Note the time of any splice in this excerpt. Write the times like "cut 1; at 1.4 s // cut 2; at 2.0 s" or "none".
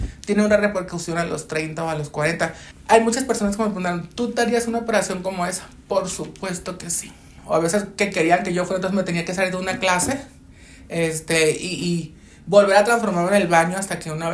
cut 1; at 2.7 s // cut 2; at 7.3 s